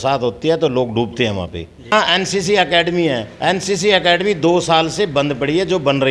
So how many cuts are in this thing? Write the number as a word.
one